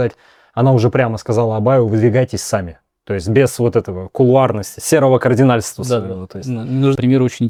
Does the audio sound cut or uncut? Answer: uncut